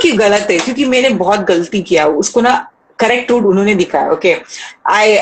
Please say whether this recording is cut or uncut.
uncut